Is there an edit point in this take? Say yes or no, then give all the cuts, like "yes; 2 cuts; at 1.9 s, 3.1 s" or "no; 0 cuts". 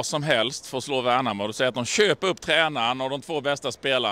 no; 0 cuts